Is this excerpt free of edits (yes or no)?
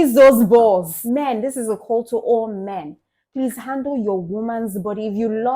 no